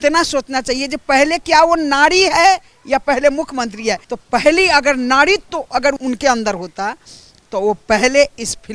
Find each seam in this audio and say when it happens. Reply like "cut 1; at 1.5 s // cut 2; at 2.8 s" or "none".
cut 1; at 4.1 s // cut 2; at 6.0 s

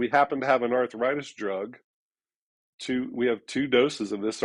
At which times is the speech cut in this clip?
none

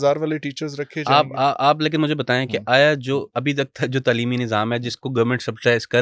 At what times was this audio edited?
none

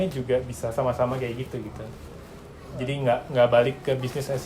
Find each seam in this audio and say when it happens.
cut 1; at 2.7 s

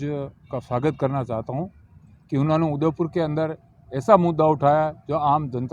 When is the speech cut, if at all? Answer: none

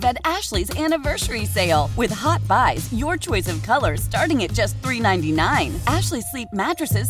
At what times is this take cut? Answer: none

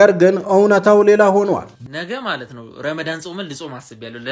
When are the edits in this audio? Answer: cut 1; at 1.7 s

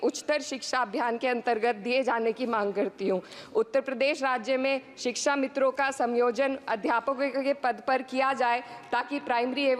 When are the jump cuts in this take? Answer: none

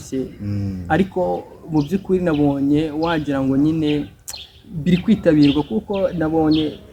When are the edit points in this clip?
none

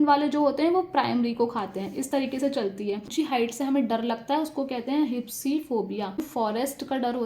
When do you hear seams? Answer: cut 1; at 3.1 s // cut 2; at 6.3 s

